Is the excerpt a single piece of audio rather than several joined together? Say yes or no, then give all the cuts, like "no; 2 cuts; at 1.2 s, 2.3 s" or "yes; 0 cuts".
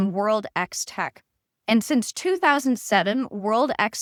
yes; 0 cuts